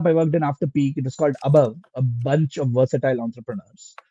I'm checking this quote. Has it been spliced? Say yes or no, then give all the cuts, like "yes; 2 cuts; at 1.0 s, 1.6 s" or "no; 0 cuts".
no; 0 cuts